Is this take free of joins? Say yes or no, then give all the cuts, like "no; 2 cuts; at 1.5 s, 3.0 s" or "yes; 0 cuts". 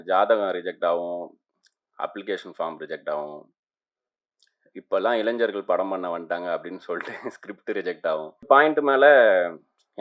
no; 1 cut; at 8.4 s